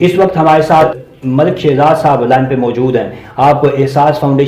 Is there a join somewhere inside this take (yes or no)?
yes